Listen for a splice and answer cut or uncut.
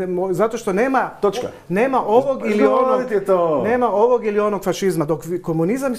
uncut